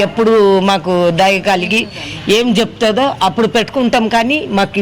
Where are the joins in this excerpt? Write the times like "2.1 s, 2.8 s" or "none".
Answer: none